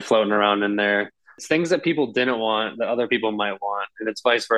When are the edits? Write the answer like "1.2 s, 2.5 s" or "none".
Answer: 1.3 s